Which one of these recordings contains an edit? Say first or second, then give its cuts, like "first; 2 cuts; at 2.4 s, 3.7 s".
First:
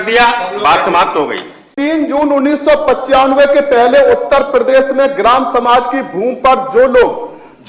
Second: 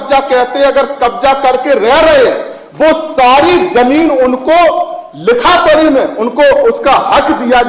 first; 1 cut; at 1.7 s